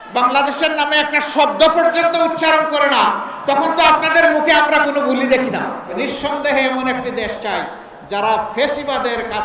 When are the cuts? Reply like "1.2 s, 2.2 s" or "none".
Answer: 5.9 s